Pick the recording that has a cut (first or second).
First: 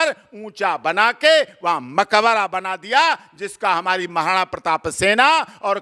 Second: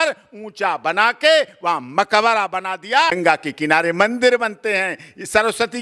second